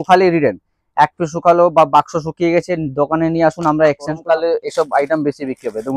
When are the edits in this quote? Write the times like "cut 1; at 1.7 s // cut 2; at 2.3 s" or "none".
cut 1; at 4.2 s